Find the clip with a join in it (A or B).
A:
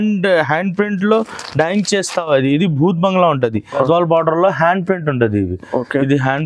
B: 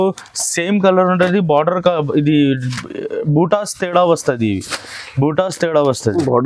A